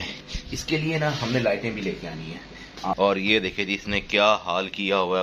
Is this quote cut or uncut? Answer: cut